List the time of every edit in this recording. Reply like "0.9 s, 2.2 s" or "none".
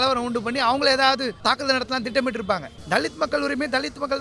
1.4 s, 2.7 s